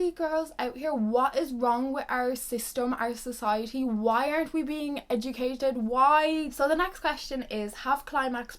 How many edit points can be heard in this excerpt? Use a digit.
1